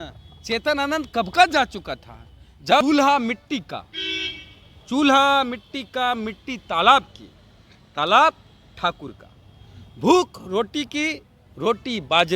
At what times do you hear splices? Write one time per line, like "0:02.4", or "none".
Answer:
0:02.8